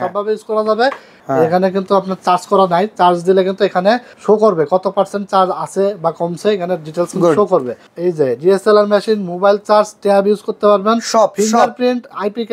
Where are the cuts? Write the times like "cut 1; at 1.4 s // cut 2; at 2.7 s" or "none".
cut 1; at 1.1 s // cut 2; at 4.1 s // cut 3; at 7.8 s